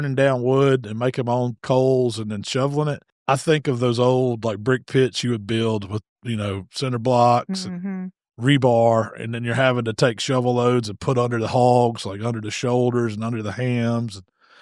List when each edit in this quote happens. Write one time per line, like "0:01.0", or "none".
0:03.1